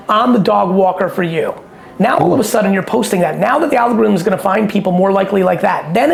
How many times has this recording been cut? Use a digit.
0